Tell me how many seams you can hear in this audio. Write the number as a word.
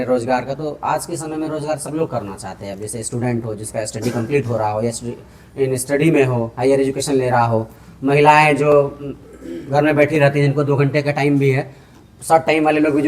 zero